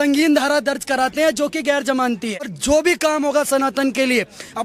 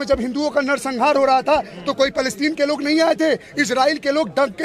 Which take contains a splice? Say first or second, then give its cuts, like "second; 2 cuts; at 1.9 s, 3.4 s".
first; 1 cut; at 2.6 s